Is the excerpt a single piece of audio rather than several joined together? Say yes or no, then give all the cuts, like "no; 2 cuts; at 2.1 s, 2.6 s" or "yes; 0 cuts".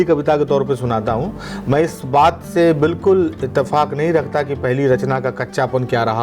yes; 0 cuts